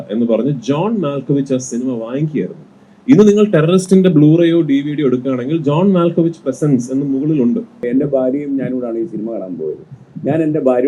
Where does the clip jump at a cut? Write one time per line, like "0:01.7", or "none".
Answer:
0:07.8